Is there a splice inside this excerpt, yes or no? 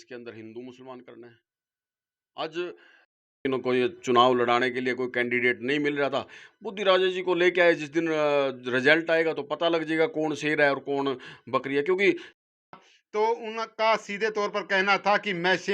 yes